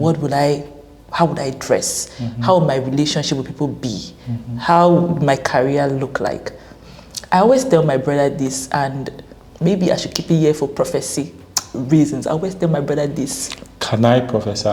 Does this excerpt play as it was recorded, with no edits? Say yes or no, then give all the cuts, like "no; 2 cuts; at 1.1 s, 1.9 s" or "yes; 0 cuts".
yes; 0 cuts